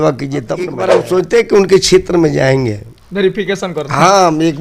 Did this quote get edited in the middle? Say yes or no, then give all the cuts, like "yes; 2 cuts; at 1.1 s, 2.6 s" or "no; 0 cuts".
yes; 1 cut; at 1.0 s